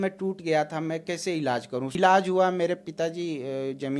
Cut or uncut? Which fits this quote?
cut